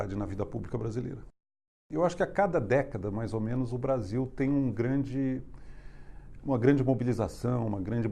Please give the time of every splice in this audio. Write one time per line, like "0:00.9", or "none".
none